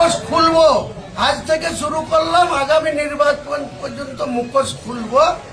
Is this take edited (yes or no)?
yes